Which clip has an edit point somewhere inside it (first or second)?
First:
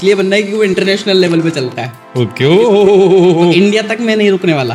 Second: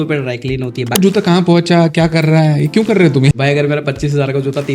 second